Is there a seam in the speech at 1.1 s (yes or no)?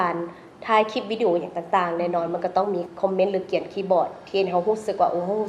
no